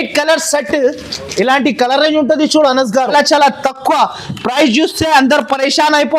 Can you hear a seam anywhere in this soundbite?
yes; 1 cut; at 3.1 s

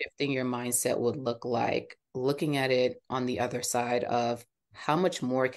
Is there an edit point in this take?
no; 0 cuts

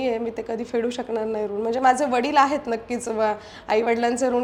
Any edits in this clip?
no; 0 cuts

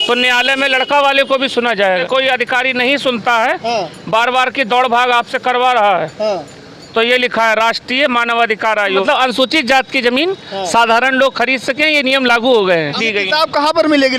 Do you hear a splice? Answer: yes; 3 cuts; at 2.0 s, 9.0 s, 13.0 s

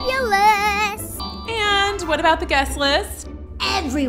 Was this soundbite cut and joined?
yes; 1 cut; at 1.2 s

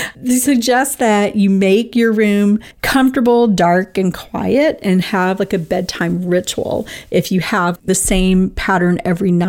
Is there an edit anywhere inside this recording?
yes; 2 cuts; at 2.7 s, 7.8 s

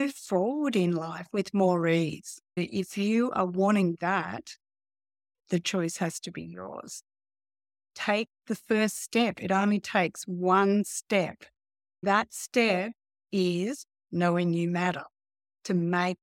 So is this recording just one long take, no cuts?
no; 2 cuts; at 2.6 s, 12.0 s

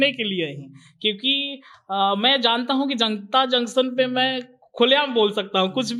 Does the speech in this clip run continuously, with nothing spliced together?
yes; 0 cuts

